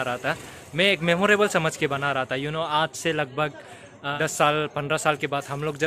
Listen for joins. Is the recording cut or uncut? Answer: cut